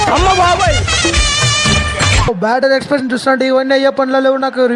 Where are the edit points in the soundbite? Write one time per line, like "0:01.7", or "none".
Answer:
0:02.3